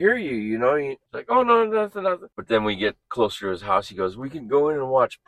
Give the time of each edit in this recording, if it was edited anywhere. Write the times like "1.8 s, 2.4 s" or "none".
1.0 s, 2.3 s